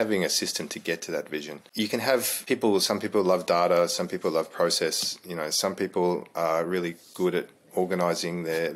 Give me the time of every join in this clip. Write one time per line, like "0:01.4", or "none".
0:01.6
0:02.3